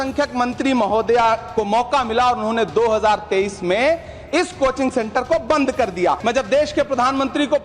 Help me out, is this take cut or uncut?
cut